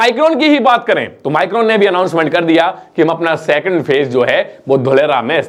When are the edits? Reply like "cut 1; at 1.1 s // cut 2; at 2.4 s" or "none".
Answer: none